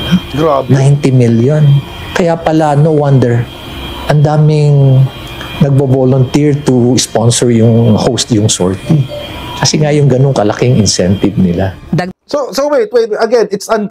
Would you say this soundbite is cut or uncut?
uncut